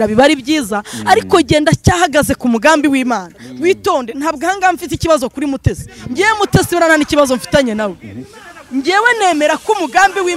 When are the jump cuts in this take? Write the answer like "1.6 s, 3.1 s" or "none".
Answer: none